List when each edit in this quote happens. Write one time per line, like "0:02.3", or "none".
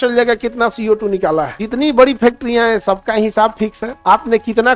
0:01.6
0:03.9